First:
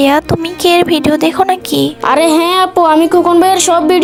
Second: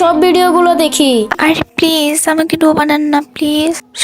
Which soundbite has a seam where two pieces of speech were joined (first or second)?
second